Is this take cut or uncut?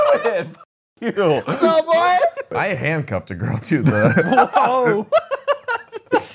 cut